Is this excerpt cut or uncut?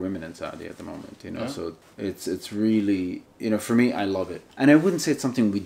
cut